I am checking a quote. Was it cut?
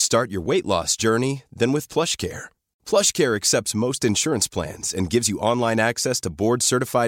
no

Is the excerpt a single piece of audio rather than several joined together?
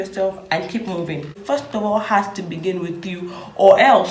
no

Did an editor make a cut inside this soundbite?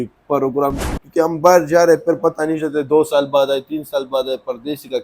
yes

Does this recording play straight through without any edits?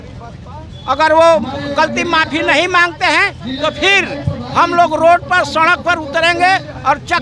yes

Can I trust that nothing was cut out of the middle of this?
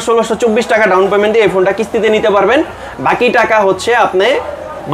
yes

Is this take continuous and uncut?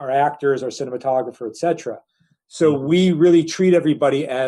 yes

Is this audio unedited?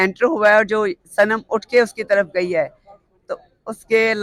yes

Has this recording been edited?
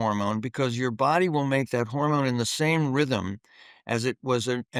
no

